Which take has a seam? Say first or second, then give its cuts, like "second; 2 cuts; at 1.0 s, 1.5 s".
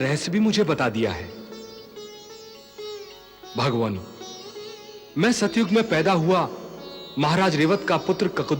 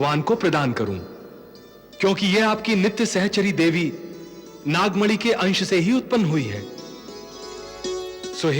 second; 1 cut; at 7.6 s